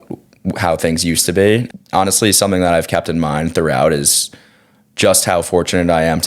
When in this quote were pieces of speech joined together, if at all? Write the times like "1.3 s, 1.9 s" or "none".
1.7 s